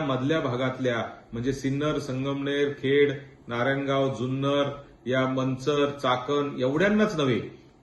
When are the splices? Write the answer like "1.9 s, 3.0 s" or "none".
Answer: none